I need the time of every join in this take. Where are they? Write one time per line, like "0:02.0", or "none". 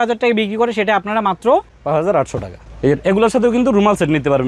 none